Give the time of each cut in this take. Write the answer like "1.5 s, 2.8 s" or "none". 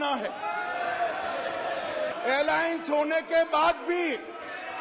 2.1 s